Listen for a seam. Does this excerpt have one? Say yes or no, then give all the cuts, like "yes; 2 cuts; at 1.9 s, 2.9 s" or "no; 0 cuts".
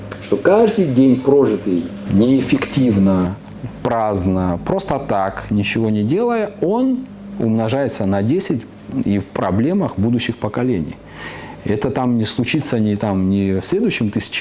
no; 0 cuts